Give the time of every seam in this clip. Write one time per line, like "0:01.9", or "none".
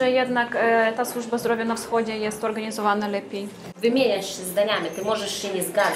0:03.6